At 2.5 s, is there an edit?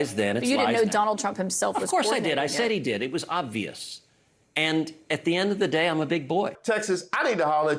no; 2 cuts; at 4.5 s, 6.6 s

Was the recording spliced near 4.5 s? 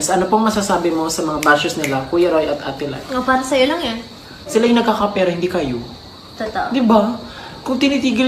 yes; 1 cut; at 4.5 s

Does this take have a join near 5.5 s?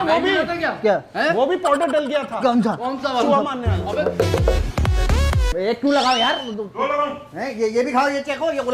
yes; 1 cut; at 5.5 s

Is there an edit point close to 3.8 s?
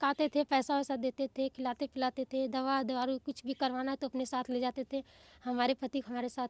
no; 0 cuts

